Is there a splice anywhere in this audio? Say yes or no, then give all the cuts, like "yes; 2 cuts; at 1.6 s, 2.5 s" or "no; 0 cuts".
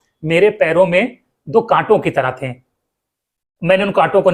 no; 0 cuts